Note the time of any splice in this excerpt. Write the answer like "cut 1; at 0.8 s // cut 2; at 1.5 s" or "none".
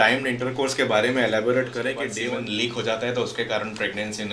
cut 1; at 2.1 s